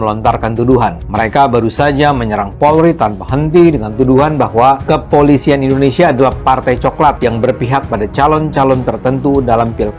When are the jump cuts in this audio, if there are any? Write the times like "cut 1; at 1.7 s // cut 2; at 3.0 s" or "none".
cut 1; at 1.0 s // cut 2; at 4.8 s // cut 3; at 7.2 s